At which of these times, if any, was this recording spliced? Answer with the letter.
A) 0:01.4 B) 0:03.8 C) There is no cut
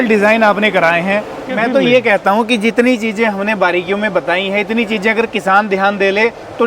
A